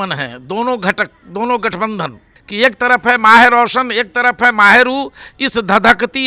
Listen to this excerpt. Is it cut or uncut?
cut